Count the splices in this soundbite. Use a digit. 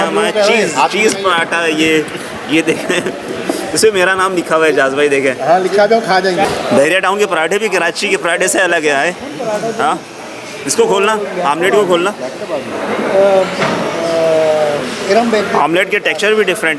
0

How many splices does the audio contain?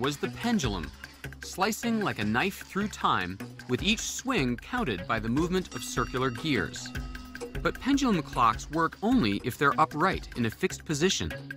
1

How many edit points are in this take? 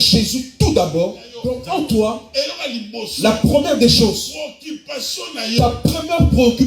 1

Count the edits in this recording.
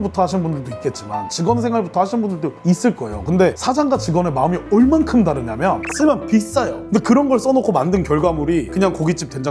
1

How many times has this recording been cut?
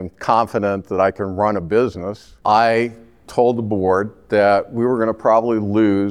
1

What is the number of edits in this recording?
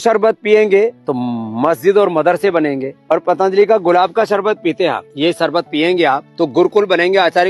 4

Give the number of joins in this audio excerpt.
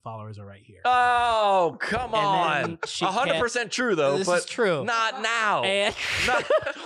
0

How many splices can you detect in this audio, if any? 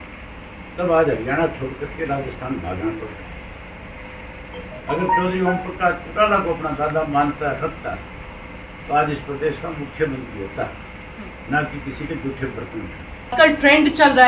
1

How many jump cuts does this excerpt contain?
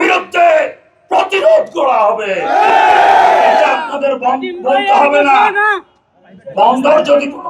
0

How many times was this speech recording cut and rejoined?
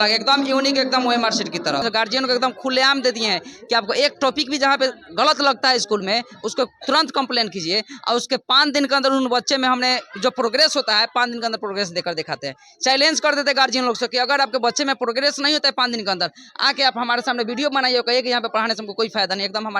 1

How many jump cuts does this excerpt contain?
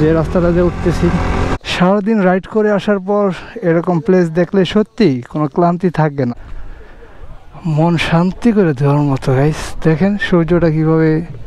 2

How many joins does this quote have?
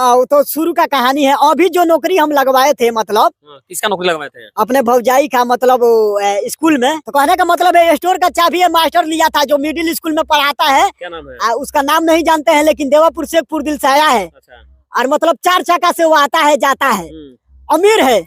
1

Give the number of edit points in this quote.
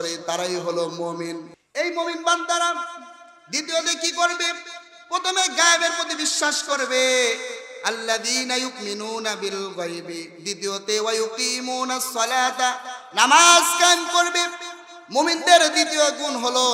1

